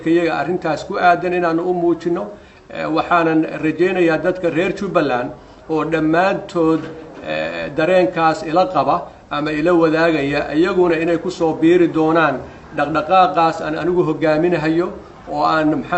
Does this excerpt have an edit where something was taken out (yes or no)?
no